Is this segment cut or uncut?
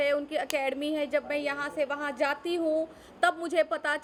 uncut